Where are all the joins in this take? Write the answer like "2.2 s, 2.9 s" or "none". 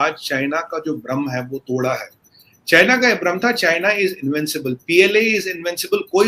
none